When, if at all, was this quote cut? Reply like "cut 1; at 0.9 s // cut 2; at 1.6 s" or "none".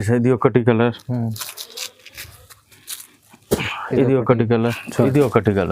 cut 1; at 4.7 s